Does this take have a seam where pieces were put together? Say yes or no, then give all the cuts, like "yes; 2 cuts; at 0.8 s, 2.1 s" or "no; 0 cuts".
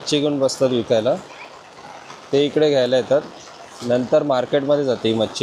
no; 0 cuts